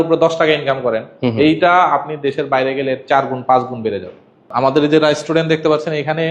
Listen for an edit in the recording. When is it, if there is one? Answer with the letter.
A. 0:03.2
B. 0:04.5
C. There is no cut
B